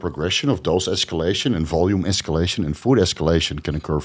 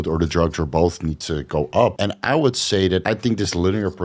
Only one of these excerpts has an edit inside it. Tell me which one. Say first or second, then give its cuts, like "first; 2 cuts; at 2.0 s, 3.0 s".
second; 2 cuts; at 2.0 s, 3.0 s